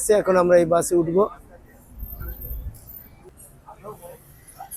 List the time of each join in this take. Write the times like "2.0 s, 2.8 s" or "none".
3.3 s